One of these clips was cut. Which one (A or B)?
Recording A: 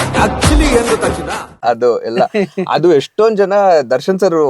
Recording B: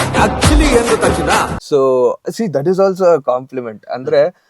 A